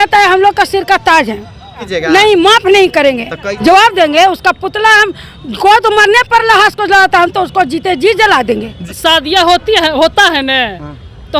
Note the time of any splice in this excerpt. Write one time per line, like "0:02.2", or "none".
0:01.9
0:03.4
0:08.9